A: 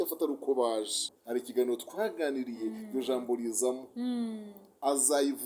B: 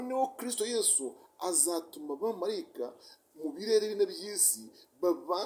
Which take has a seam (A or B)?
A